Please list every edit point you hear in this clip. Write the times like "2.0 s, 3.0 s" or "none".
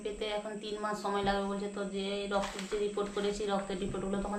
none